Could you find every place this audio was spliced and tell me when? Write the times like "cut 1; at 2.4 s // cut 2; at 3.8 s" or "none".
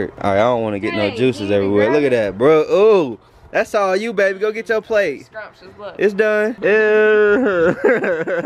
cut 1; at 6.6 s